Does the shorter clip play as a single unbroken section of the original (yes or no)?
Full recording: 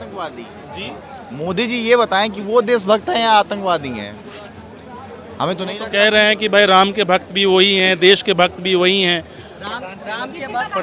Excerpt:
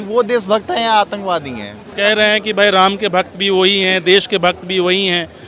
no